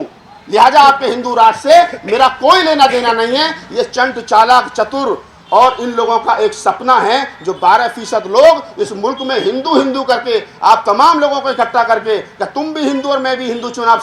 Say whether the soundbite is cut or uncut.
uncut